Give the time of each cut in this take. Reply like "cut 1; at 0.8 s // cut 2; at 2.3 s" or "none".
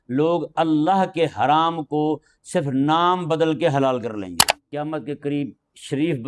cut 1; at 4.5 s